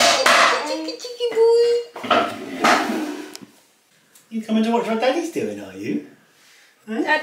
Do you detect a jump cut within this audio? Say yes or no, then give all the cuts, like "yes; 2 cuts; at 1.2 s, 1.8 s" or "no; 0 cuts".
yes; 1 cut; at 3.7 s